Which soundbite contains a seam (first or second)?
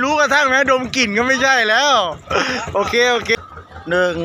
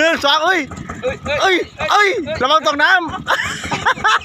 first